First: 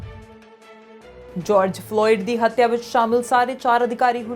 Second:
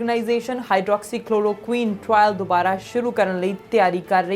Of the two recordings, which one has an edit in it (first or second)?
first